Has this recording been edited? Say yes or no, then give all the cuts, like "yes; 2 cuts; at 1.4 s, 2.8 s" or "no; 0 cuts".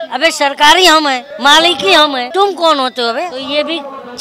yes; 3 cuts; at 1.3 s, 2.2 s, 3.4 s